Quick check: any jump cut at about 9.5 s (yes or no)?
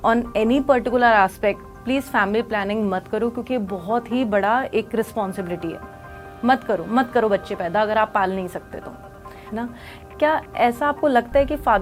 yes